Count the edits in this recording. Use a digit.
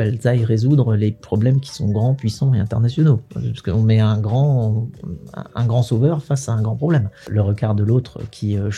1